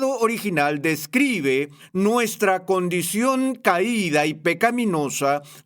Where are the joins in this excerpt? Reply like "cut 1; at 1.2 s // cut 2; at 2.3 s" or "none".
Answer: cut 1; at 1.8 s